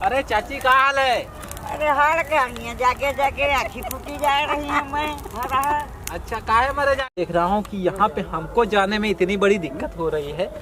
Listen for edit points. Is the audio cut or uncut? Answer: cut